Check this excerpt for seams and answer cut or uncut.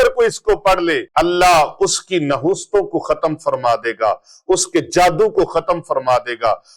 cut